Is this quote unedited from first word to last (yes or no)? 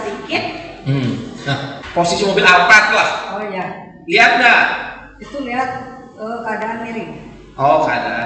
no